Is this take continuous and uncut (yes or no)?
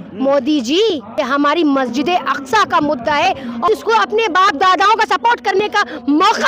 no